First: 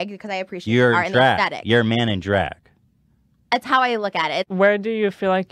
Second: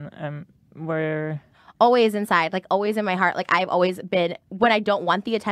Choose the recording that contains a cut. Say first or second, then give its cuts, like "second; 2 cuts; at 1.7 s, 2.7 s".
first; 1 cut; at 4.4 s